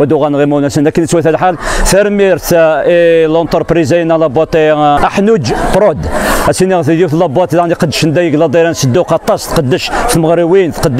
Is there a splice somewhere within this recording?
yes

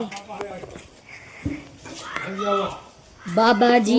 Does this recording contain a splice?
no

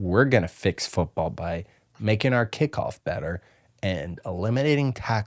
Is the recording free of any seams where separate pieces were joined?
yes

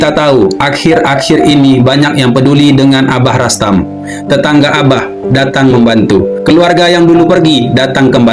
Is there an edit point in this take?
no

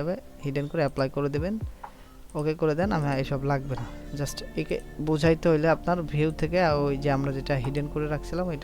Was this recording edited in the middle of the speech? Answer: no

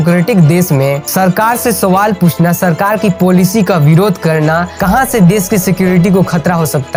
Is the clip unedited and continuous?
yes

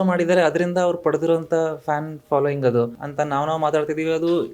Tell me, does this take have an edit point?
yes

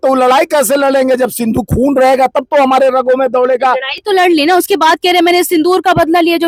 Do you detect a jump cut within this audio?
no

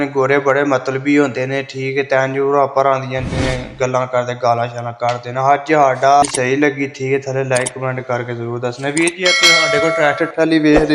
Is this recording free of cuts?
no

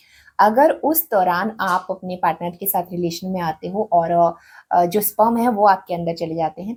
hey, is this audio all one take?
yes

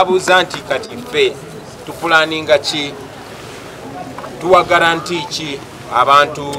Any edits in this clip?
no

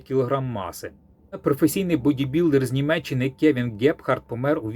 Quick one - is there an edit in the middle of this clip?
yes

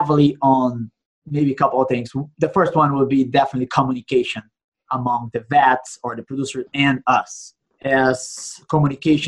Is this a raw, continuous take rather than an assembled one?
yes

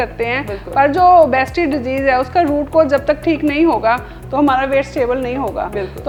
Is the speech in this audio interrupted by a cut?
no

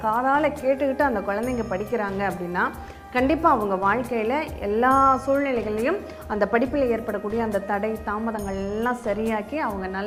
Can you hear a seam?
no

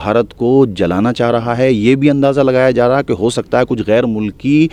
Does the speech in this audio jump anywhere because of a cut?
no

